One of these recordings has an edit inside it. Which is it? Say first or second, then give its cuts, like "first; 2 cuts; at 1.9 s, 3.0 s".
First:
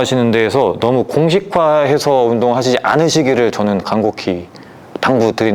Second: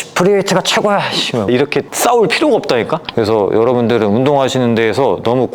second; 2 cuts; at 1.5 s, 3.0 s